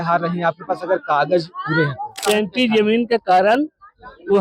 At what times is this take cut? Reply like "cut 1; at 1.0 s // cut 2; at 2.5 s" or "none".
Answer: cut 1; at 2.1 s